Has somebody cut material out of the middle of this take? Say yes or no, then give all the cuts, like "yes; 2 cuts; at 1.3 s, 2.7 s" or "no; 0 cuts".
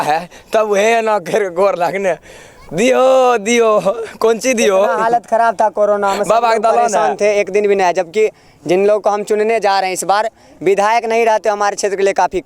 no; 0 cuts